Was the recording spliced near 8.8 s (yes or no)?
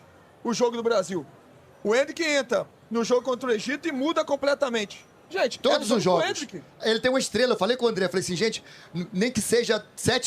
no